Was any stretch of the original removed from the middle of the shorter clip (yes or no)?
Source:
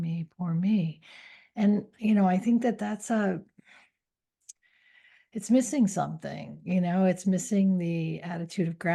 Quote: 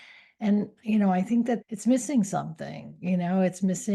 yes